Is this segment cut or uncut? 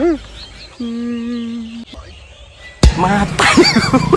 cut